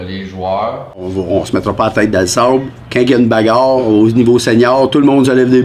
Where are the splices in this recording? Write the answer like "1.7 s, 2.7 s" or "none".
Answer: 1.1 s